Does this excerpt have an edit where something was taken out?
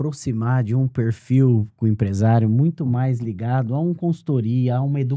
no; 0 cuts

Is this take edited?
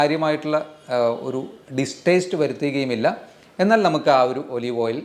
no; 0 cuts

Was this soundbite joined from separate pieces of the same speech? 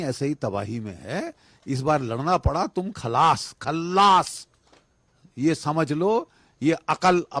no; 0 cuts

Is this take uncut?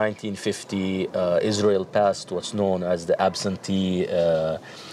yes; 0 cuts

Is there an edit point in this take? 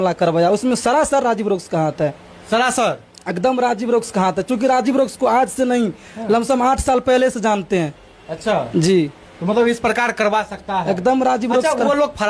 no; 0 cuts

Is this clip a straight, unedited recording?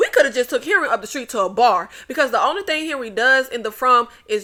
yes; 0 cuts

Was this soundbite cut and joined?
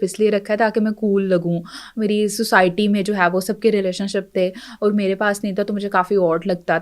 no; 0 cuts

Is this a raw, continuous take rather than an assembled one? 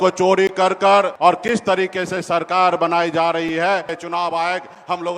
no; 2 cuts; at 1.1 s, 4.0 s

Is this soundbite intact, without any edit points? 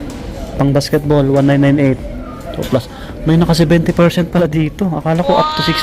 yes; 0 cuts

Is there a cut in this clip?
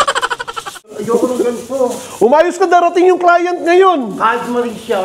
yes; 1 cut; at 1.0 s

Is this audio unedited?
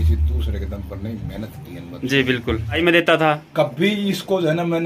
no; 1 cut; at 2.8 s

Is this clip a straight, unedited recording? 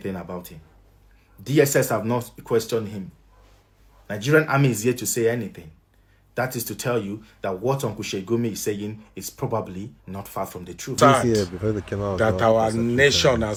yes; 0 cuts

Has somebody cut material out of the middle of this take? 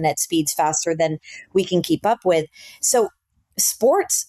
no; 0 cuts

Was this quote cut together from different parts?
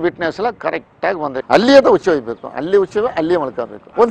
yes; 1 cut; at 1.4 s

